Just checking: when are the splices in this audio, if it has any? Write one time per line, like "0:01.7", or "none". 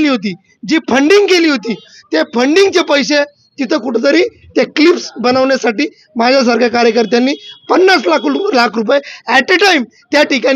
none